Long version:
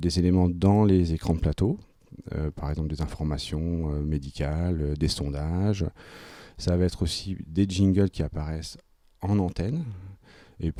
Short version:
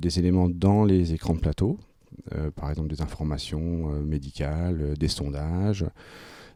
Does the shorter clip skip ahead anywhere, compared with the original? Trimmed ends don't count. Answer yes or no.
no